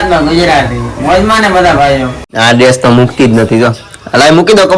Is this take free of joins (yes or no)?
no